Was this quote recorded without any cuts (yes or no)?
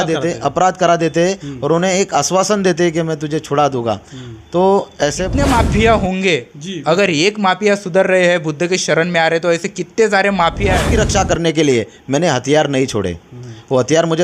no